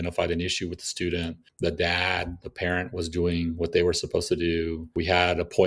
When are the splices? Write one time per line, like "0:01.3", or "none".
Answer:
0:01.4
0:04.8